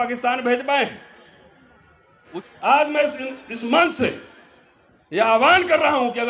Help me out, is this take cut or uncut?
cut